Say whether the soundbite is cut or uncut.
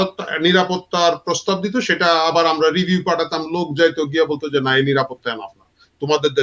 uncut